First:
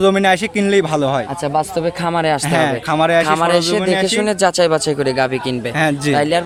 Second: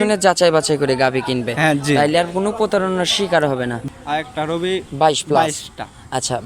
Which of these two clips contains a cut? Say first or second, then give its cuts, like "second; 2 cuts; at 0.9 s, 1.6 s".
second; 1 cut; at 3.8 s